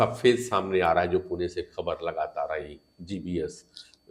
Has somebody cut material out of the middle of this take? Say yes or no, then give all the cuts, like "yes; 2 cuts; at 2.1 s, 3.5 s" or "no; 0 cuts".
no; 0 cuts